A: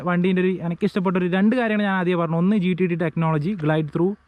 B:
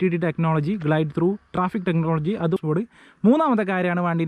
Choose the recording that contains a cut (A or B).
B